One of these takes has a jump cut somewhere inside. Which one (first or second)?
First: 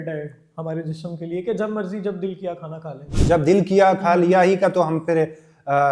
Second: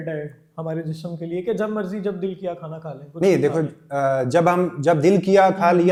first